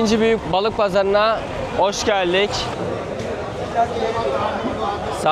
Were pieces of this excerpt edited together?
yes; 1 cut; at 2.7 s

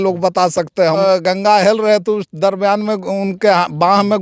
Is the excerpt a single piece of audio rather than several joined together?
no; 1 cut; at 1.0 s

